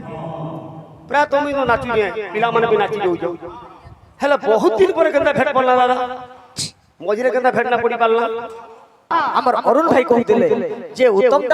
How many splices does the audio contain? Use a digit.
1